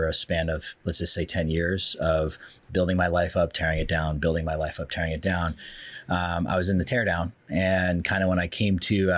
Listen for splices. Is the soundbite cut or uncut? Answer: uncut